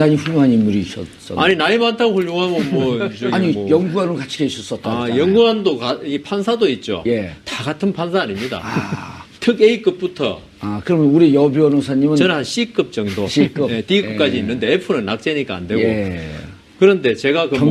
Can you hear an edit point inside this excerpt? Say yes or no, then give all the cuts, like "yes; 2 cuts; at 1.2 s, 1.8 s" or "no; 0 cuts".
yes; 1 cut; at 12.4 s